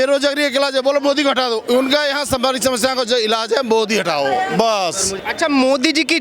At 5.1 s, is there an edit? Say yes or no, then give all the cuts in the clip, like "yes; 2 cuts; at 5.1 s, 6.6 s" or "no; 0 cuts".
yes; 1 cut; at 5.1 s